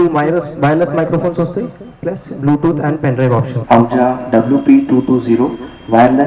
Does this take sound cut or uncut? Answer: cut